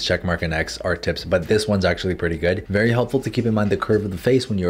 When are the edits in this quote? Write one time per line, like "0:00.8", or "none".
none